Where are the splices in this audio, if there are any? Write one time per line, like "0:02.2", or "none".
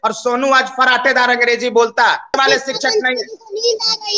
0:02.3